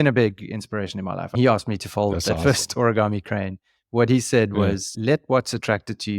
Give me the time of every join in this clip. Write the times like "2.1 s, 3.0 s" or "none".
none